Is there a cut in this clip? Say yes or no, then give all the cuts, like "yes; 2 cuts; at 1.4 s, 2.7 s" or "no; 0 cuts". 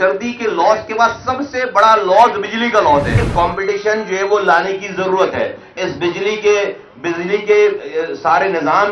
yes; 1 cut; at 3.2 s